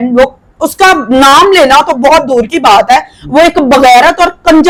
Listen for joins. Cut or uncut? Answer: uncut